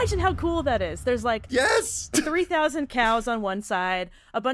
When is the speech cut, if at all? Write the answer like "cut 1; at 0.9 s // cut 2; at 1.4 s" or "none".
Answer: none

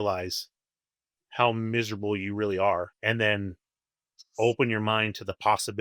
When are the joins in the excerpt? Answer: cut 1; at 2.9 s

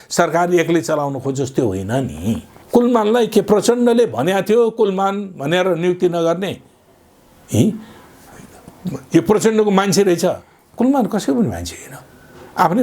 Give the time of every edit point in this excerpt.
cut 1; at 2.5 s

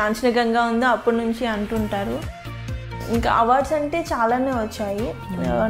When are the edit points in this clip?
cut 1; at 2.8 s

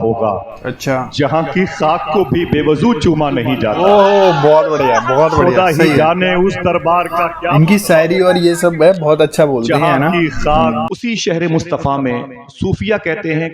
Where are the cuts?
cut 1; at 10.9 s

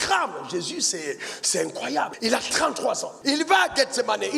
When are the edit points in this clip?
cut 1; at 2.1 s // cut 2; at 3.1 s

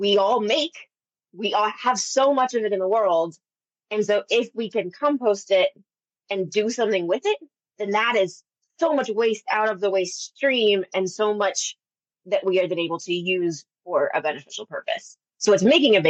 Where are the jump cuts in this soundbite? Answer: none

